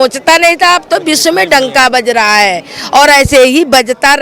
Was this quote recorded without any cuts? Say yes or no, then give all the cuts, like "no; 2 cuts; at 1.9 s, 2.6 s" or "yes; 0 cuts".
yes; 0 cuts